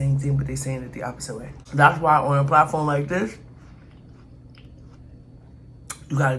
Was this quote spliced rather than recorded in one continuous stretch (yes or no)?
yes